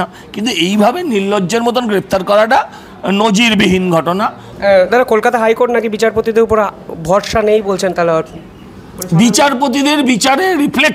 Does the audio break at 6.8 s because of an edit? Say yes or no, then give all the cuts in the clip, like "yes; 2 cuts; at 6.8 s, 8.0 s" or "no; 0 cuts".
no; 1 cut; at 4.4 s